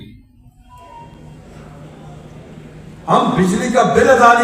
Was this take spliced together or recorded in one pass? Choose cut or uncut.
uncut